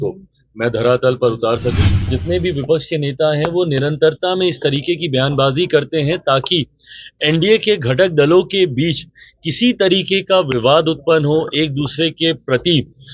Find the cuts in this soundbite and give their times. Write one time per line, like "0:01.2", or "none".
0:02.1